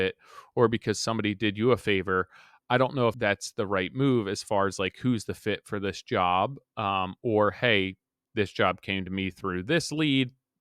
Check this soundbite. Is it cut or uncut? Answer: cut